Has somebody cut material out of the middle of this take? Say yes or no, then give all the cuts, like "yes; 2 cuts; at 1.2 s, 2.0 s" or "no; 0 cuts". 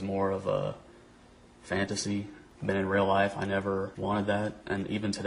yes; 2 cuts; at 2.4 s, 3.9 s